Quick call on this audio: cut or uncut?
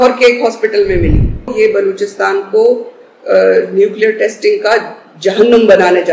cut